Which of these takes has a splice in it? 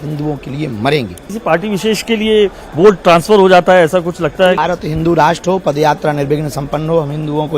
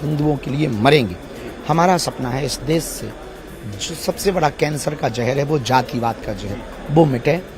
first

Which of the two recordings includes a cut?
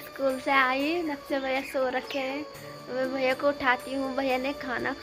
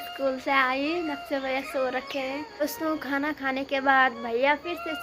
second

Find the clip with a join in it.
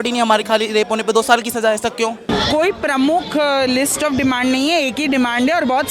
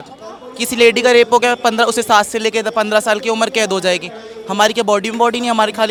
first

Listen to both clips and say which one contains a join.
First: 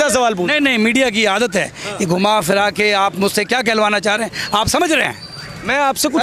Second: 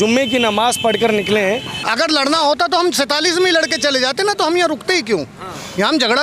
second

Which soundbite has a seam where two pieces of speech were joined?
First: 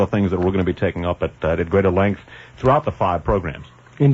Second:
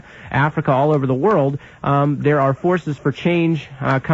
first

